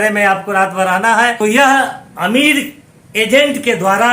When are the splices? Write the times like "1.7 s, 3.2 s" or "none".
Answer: 1.4 s